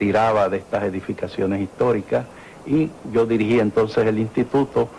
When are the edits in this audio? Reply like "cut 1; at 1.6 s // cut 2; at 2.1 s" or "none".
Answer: cut 1; at 1.9 s